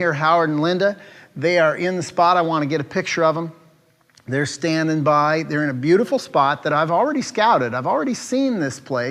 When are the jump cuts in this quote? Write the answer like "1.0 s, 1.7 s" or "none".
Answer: 5.8 s